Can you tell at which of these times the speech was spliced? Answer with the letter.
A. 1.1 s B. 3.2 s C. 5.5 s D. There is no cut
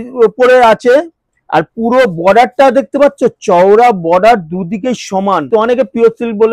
C